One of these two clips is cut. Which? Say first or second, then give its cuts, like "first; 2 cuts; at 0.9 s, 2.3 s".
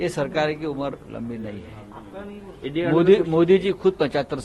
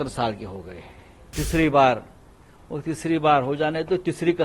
second; 1 cut; at 1.3 s